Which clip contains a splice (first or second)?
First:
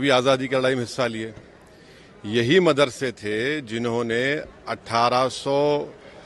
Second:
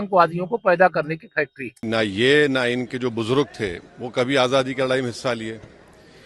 second